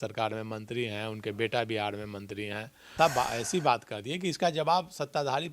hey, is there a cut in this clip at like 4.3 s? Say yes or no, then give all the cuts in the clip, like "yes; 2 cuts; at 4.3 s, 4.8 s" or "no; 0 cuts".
no; 1 cut; at 2.9 s